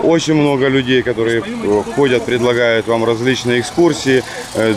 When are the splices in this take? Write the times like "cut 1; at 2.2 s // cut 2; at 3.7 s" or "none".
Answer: none